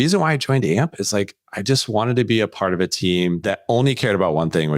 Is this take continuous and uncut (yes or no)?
no